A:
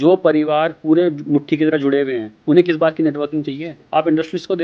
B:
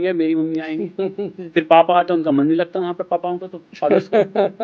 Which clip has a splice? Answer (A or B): A